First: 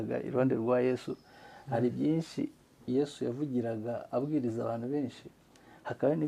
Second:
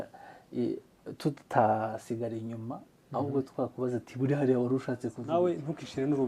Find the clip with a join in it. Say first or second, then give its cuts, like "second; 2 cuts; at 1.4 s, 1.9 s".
second; 1 cut; at 5.2 s